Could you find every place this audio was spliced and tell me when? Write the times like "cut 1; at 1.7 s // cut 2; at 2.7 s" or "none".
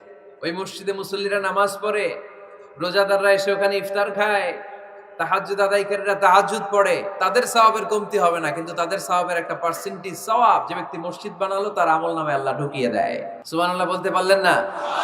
cut 1; at 13.4 s